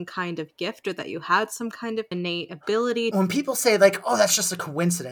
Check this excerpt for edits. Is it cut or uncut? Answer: cut